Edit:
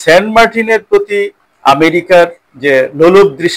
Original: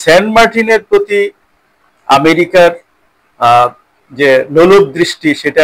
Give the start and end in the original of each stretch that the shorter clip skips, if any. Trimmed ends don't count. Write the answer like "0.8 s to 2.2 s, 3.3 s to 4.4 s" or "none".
1.4 s to 1.9 s, 2.9 s to 4.0 s